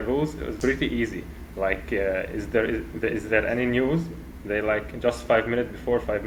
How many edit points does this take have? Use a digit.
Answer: 0